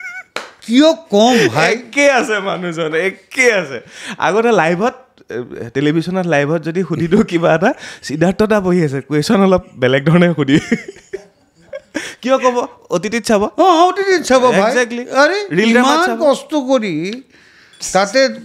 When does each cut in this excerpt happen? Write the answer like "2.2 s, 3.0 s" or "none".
none